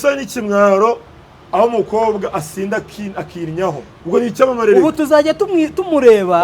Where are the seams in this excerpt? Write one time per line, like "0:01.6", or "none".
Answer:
0:03.9